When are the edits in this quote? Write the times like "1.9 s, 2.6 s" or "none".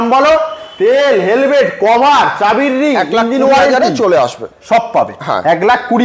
none